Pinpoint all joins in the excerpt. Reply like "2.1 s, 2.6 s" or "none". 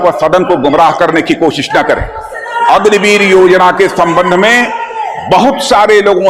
none